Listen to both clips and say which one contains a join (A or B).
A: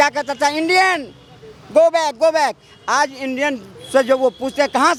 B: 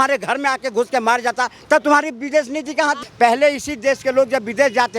B